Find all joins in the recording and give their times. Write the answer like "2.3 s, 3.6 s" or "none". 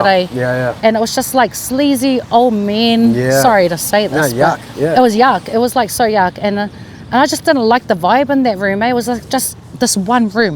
none